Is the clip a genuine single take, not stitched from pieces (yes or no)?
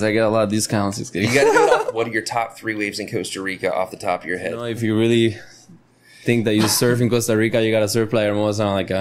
no